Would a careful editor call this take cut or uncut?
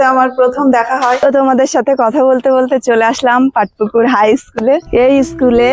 cut